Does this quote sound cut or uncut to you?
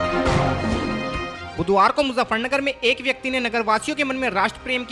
uncut